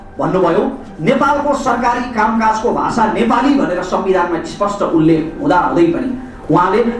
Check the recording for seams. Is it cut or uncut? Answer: uncut